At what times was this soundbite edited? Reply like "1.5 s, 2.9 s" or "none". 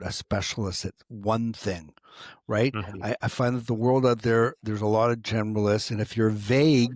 none